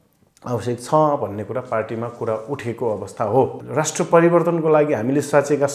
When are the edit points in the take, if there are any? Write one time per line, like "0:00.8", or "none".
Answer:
0:03.6